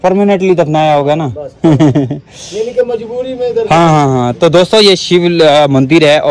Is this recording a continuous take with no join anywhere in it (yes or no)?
yes